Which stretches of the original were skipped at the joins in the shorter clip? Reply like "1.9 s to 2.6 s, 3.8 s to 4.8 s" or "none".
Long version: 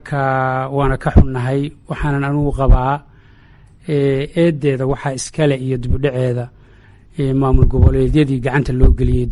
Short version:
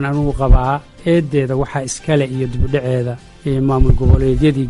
3.2 s to 4.3 s, 6.6 s to 7.0 s